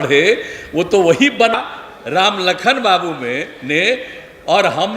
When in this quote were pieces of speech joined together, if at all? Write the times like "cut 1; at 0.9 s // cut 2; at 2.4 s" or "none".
cut 1; at 1.6 s